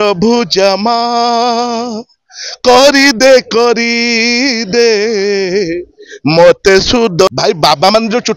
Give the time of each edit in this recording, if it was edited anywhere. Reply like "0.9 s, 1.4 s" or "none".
7.3 s